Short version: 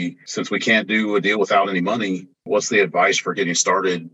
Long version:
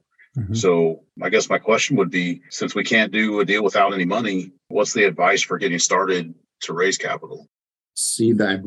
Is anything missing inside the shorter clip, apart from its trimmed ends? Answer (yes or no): no